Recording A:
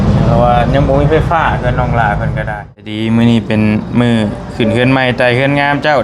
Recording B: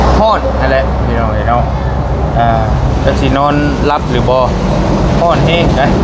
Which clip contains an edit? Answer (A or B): A